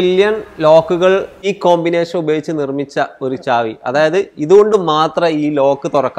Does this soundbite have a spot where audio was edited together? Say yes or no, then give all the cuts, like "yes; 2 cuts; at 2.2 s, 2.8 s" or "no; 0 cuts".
yes; 1 cut; at 1.5 s